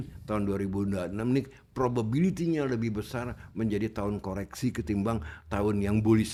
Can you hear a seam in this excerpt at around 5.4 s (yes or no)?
no